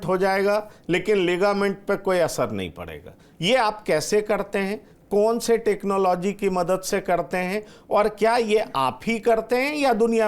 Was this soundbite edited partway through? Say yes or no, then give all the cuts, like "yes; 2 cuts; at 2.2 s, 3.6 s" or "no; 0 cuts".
no; 0 cuts